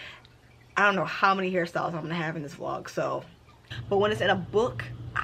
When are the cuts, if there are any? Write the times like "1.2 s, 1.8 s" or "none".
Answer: 3.7 s